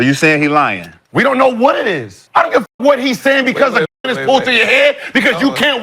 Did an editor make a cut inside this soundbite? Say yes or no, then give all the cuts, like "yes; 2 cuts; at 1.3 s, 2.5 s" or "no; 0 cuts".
yes; 1 cut; at 2.6 s